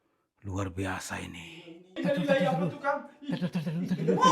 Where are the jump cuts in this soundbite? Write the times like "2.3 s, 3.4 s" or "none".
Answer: 1.9 s